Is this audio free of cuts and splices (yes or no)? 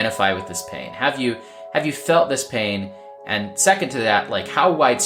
yes